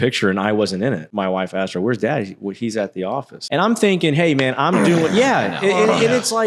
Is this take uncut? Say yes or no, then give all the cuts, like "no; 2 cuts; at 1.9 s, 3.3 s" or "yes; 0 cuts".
no; 2 cuts; at 1.1 s, 3.4 s